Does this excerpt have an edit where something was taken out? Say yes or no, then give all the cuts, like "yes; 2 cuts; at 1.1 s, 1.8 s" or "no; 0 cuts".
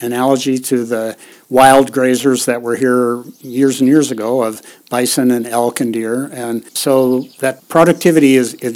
yes; 2 cuts; at 6.7 s, 7.4 s